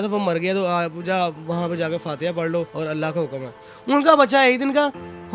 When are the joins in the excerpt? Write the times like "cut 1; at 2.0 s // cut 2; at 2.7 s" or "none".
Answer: cut 1; at 2.7 s // cut 2; at 3.7 s